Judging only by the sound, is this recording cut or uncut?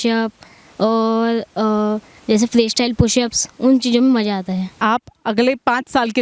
cut